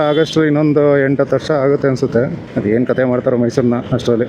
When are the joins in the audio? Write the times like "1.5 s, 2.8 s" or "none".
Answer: 2.4 s